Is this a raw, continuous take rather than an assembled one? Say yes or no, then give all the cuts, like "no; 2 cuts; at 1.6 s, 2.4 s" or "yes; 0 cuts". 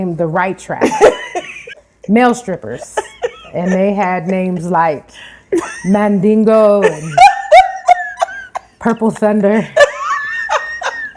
no; 1 cut; at 1.9 s